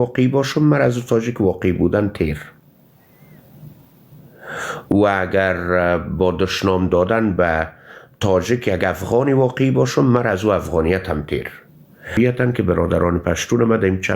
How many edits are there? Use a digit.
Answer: 1